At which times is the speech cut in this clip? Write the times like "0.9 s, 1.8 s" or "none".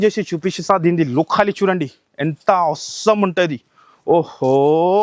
none